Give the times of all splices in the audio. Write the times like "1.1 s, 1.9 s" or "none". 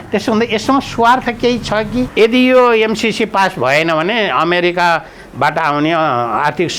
2.1 s